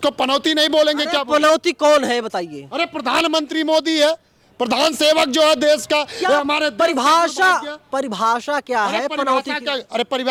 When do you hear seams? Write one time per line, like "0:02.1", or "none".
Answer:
none